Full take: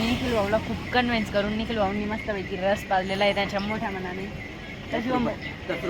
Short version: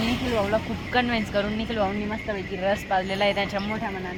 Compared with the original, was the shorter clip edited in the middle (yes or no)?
no